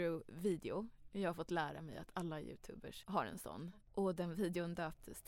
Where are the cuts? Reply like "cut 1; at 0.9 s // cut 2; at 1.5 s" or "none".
cut 1; at 2.9 s // cut 2; at 3.7 s